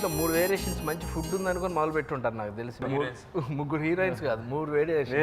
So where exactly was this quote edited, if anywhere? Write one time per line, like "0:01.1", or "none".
0:02.8